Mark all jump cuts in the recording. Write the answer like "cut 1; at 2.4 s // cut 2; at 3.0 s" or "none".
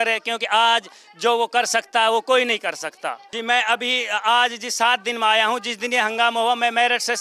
cut 1; at 3.3 s